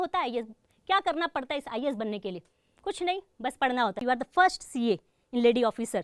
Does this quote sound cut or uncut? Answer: cut